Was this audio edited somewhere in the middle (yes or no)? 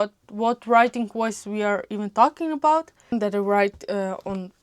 no